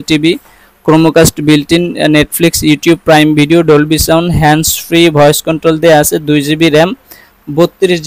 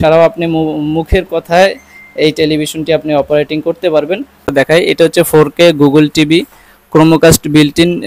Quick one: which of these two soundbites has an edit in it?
second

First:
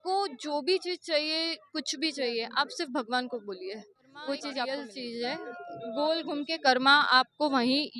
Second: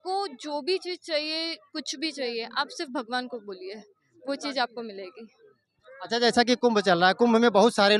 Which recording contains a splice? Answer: first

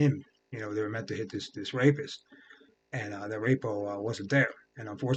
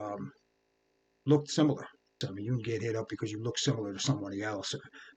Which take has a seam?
second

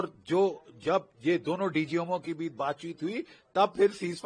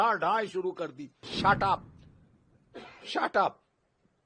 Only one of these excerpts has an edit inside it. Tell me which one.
second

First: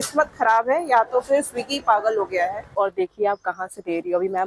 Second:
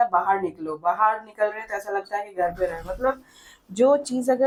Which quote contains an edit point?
first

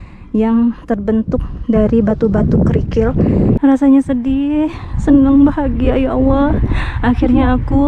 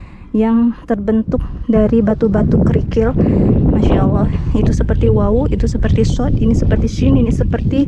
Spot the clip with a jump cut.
first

